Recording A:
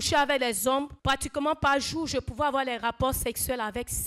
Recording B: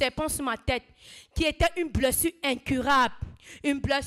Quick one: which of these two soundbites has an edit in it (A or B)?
A